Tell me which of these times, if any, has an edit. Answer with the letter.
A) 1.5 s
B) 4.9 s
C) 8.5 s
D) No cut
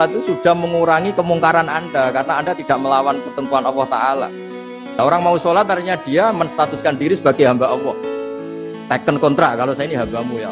B